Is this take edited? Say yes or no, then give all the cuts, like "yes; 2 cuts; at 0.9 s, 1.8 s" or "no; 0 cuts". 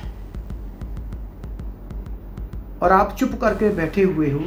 no; 0 cuts